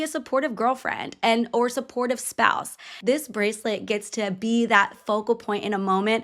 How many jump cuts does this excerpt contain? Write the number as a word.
one